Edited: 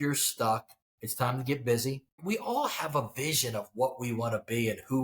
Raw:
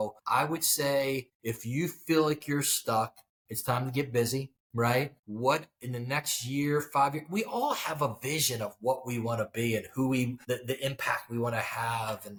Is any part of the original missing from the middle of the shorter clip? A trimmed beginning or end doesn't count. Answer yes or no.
yes